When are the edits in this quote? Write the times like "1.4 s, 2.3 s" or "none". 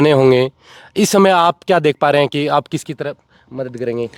none